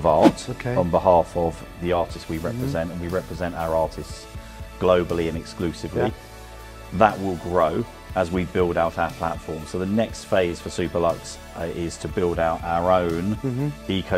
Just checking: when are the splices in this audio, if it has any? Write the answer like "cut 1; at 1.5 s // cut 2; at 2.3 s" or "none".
cut 1; at 1.6 s